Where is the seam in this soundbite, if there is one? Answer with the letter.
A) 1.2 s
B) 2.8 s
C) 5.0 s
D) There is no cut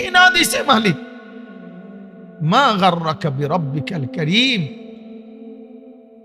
C